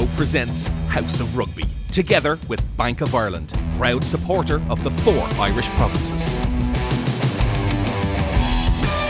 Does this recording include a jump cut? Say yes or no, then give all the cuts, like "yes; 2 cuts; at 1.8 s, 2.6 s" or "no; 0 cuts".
no; 0 cuts